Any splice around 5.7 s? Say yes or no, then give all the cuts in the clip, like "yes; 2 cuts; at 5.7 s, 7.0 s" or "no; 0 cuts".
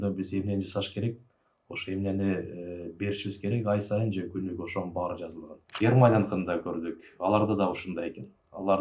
yes; 1 cut; at 5.7 s